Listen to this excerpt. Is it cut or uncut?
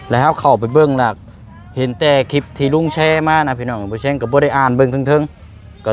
uncut